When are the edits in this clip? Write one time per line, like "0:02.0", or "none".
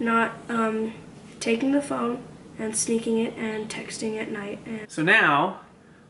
0:04.8